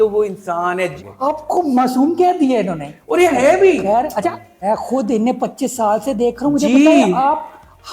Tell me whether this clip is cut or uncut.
cut